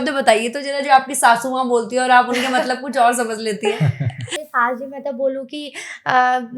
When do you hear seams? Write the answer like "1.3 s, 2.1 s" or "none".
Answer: 4.3 s

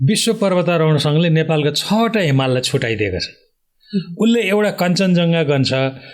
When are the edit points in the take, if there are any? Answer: none

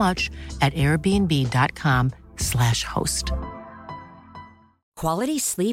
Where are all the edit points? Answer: none

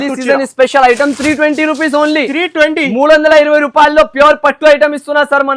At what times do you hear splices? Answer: none

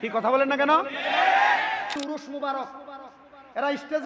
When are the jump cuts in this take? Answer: 2.0 s

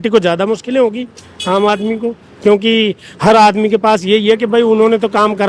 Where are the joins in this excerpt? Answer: none

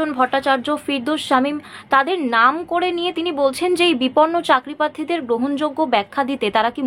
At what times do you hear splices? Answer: none

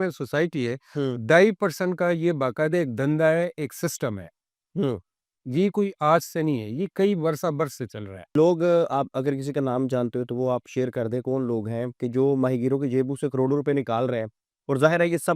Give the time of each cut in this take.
8.3 s

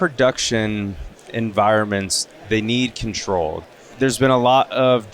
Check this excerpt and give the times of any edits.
3.6 s

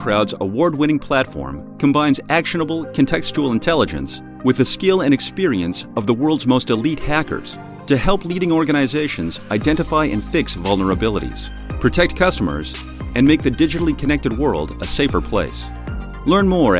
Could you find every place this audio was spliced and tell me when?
none

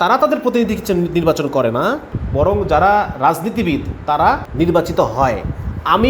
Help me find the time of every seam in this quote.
2.2 s, 4.5 s

